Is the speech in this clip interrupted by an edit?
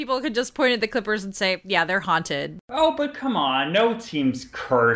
yes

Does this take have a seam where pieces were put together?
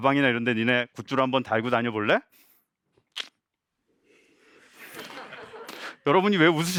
no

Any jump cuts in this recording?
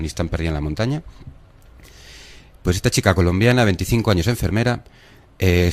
yes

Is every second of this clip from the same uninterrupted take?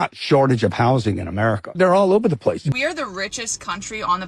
no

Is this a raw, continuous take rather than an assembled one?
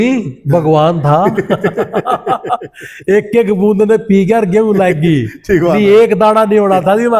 yes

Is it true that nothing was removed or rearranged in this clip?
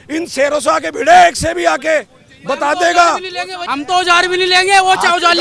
no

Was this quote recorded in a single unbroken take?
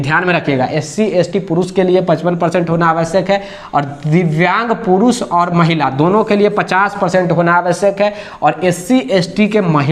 yes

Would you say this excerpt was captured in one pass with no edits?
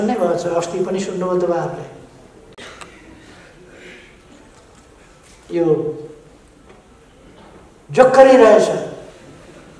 yes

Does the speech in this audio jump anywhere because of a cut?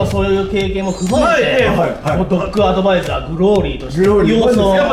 no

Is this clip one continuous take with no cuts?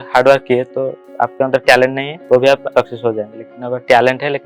no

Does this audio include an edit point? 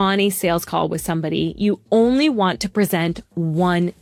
no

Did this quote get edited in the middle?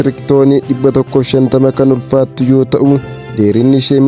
yes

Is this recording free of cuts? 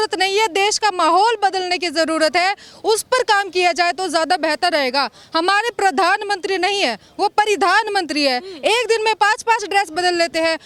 yes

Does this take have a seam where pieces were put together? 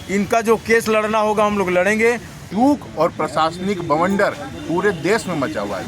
yes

